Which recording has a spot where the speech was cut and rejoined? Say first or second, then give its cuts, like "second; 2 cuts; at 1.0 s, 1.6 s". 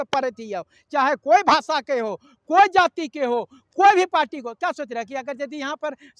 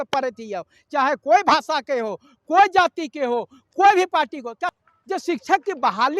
second; 1 cut; at 4.8 s